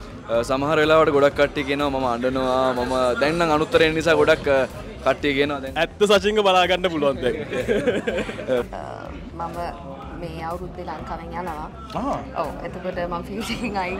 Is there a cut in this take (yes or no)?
yes